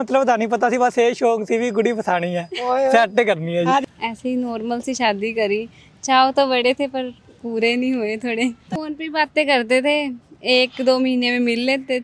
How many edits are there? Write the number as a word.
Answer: two